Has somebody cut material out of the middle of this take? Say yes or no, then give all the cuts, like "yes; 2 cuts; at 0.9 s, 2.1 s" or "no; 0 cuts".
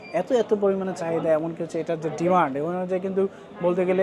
no; 0 cuts